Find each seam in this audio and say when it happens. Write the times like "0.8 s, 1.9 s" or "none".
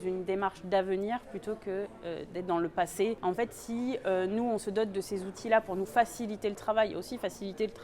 3.2 s

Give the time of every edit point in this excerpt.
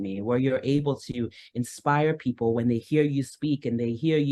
none

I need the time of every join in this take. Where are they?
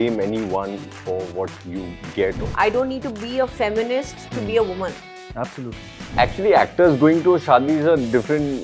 2.5 s, 6.1 s

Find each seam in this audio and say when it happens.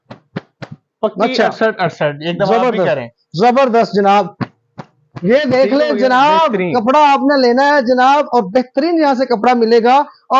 none

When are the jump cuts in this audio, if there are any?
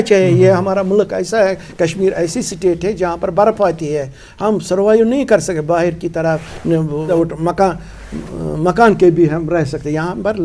7.1 s

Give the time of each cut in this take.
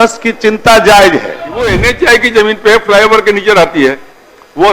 1.5 s

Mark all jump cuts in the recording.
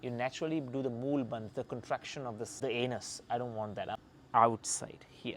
2.6 s, 3.9 s

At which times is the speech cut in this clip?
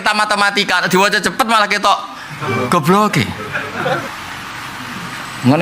4.1 s

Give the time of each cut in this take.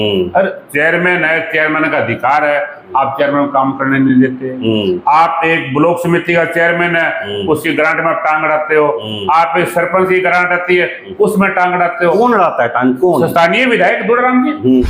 none

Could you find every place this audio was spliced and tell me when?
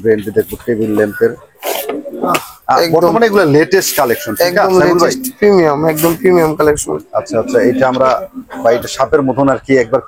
none

